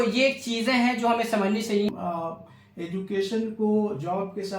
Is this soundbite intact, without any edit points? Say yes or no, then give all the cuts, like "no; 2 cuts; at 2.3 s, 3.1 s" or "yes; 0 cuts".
no; 1 cut; at 1.9 s